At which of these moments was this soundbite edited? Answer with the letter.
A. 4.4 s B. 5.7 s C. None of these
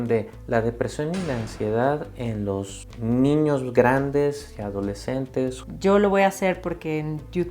B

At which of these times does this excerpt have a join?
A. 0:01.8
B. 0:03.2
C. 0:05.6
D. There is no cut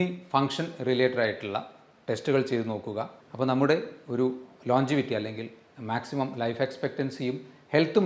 B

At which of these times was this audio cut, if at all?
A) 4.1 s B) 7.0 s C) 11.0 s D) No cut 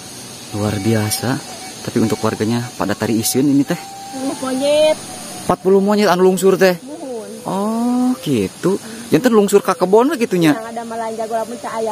A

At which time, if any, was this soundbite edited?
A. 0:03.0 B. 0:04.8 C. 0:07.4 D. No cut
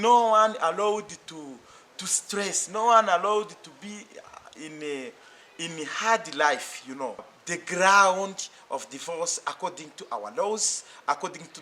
C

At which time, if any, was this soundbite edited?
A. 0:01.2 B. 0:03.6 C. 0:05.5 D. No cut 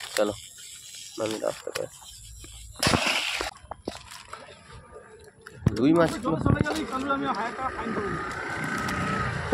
B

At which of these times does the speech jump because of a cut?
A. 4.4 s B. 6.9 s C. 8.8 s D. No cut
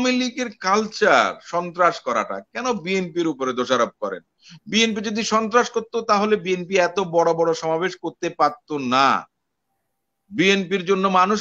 D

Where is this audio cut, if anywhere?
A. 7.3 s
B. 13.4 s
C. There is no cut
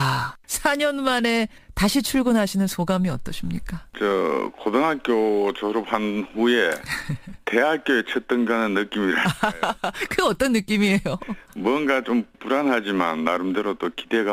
C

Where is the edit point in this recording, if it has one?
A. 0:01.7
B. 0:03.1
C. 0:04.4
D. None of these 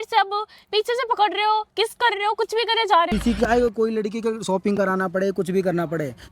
B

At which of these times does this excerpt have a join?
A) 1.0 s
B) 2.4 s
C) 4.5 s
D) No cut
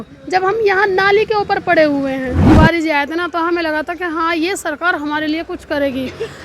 B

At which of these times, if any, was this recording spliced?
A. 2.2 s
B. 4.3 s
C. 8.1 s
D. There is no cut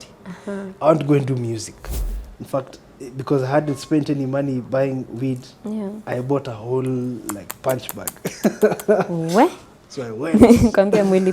A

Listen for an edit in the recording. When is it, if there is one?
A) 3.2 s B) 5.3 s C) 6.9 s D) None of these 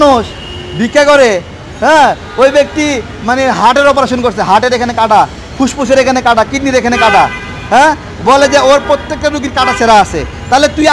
D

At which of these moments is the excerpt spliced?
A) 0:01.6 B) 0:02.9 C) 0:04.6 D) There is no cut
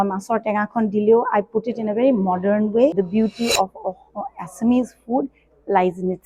B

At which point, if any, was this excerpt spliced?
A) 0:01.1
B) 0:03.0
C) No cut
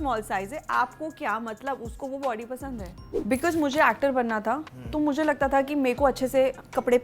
B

